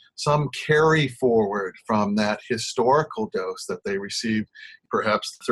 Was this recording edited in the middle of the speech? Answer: no; 0 cuts

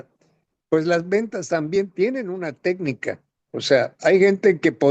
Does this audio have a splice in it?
no; 0 cuts

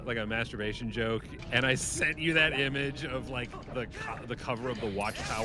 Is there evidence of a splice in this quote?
yes; 1 cut; at 1.3 s

